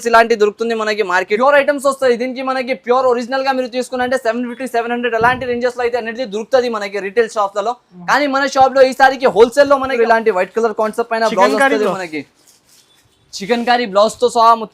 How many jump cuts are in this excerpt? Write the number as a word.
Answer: two